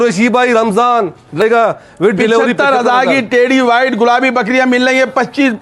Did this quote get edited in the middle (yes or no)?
yes